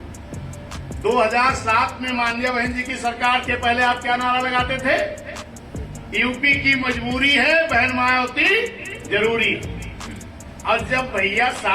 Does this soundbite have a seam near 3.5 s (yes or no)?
yes